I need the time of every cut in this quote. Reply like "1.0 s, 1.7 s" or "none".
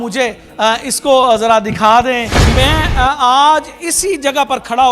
2.3 s